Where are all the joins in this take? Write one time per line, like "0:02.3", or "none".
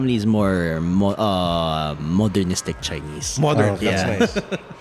none